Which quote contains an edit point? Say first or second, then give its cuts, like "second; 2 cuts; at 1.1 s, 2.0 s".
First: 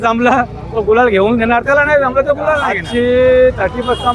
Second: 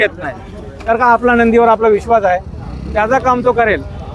first; 1 cut; at 2.8 s